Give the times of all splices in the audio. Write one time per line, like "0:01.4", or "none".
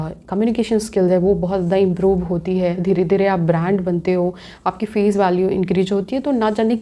none